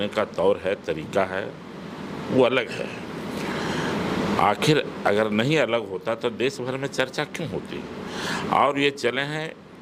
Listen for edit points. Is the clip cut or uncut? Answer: uncut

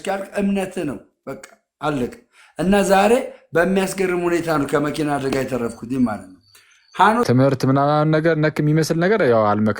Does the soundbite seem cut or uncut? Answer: cut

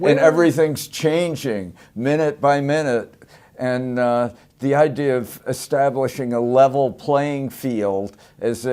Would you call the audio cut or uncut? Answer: cut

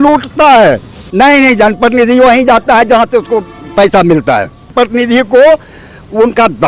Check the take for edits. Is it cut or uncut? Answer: cut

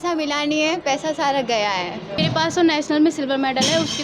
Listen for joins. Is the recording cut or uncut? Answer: cut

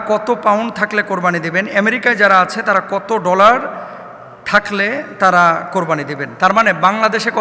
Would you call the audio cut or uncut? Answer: uncut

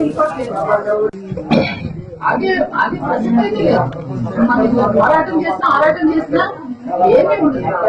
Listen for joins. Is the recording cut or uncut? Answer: cut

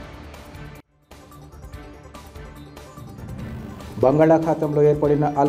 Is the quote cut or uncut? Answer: uncut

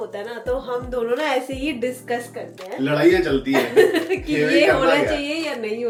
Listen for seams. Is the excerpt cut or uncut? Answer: uncut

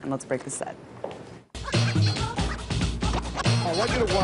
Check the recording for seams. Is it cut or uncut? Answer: uncut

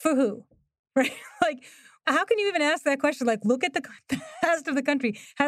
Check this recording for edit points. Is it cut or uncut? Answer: cut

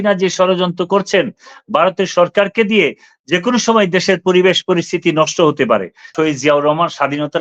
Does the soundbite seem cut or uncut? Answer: cut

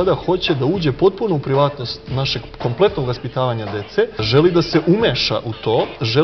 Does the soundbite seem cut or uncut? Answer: cut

